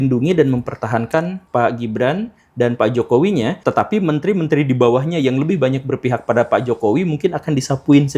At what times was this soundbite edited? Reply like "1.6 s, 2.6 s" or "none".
1.4 s, 3.6 s